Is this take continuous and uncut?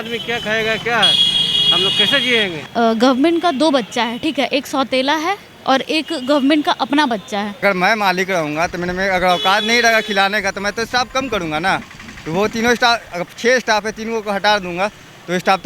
no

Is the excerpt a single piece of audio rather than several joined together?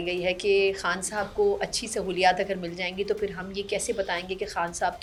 yes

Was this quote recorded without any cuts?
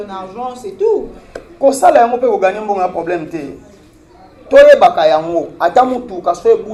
yes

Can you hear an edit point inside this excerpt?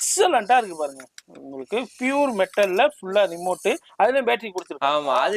no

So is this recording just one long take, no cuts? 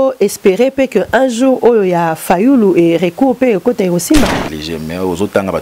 no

